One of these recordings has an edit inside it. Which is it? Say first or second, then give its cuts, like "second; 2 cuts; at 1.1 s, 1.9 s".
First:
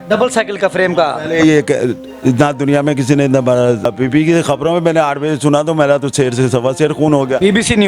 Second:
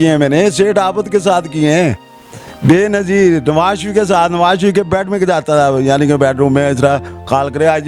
first; 1 cut; at 3.9 s